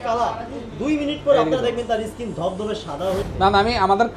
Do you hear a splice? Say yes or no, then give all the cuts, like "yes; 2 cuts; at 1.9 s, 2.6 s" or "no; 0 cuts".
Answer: yes; 1 cut; at 3.2 s